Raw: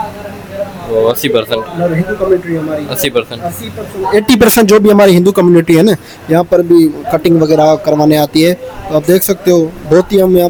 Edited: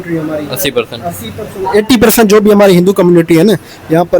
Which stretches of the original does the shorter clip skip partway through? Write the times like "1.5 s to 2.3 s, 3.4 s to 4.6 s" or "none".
none